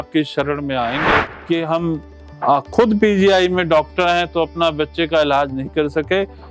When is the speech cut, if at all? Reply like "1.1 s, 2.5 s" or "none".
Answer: 1.3 s